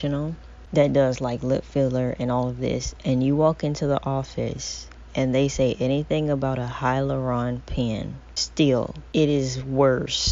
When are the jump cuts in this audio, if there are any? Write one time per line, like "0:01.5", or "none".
0:09.0